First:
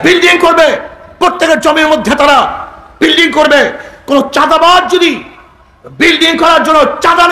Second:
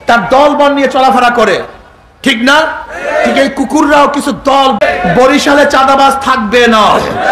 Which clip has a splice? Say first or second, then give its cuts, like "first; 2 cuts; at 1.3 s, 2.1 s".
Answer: second; 1 cut; at 4.8 s